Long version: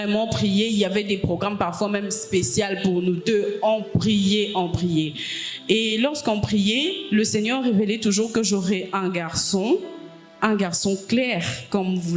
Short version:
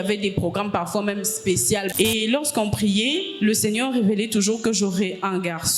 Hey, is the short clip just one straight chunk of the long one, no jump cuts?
no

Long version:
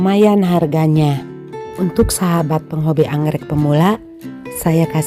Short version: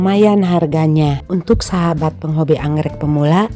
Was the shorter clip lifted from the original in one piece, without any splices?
no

